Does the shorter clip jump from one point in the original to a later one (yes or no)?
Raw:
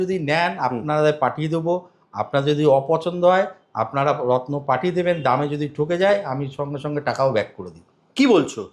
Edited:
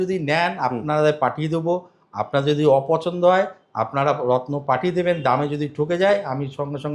no